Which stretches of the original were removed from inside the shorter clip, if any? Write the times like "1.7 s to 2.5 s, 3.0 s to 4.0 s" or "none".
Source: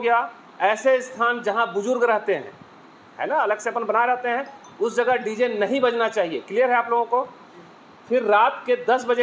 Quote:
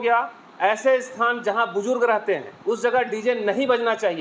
2.5 s to 4.6 s

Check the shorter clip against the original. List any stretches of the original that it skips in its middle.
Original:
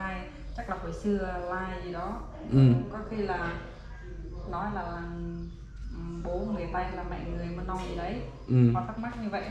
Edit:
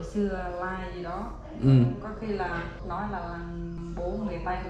3.7 s to 4.4 s, 5.4 s to 6.0 s

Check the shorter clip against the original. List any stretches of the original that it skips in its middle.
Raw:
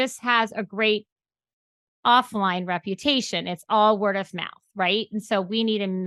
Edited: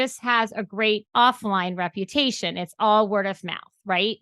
1.1 s to 2.0 s

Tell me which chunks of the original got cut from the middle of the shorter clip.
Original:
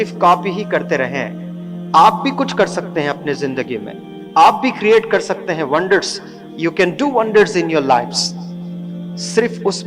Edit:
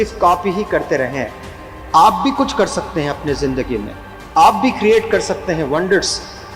none

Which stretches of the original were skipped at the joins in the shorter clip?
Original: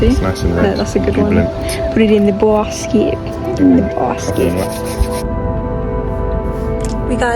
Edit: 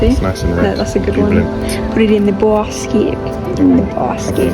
none

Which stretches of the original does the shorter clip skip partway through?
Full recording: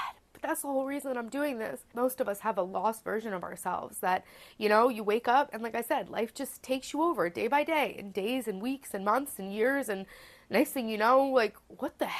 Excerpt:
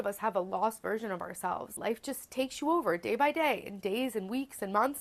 4.0 s to 6.1 s

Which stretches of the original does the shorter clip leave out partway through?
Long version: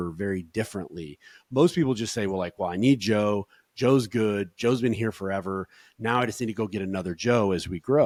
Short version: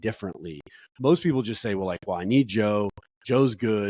none

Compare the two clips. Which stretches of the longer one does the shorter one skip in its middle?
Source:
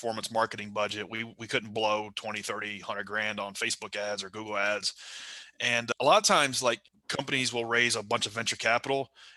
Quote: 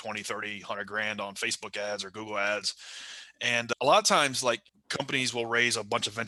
none

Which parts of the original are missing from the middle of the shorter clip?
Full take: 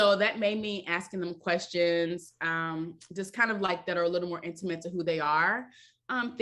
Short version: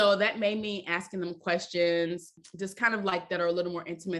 2.4 s to 3.0 s

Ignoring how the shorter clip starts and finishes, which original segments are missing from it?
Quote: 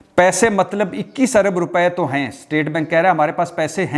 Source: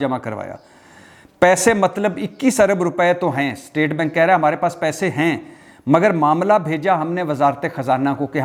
none

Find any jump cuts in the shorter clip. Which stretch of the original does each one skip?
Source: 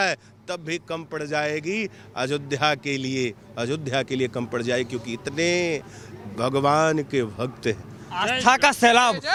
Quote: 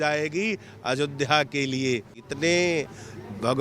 3.5 s to 5.1 s

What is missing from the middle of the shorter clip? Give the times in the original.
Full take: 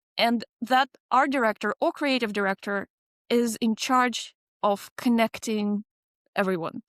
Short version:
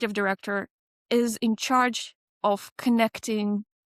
none

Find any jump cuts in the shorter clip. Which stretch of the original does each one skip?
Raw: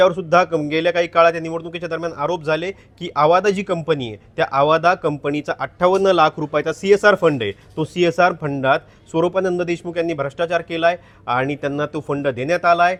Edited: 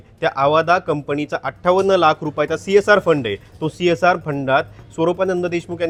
none

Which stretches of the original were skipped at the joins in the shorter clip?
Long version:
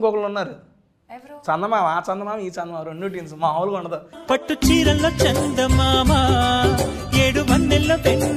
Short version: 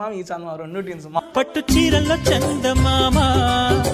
3.5 s to 4.1 s

